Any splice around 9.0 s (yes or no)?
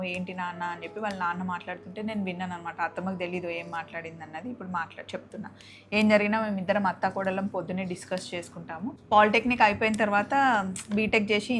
yes